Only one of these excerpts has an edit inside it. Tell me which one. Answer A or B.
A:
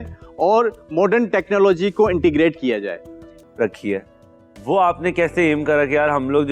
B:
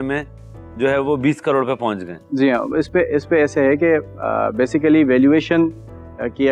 A